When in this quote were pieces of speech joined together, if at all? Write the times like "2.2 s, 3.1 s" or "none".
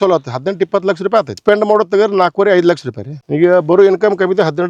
1.4 s